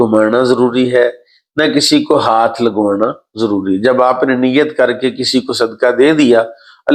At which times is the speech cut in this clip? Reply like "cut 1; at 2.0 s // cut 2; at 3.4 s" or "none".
none